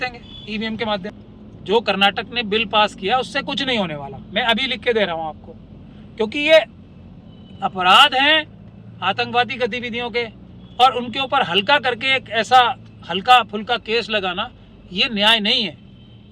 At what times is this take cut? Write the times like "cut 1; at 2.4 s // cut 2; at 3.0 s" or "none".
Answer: cut 1; at 1.1 s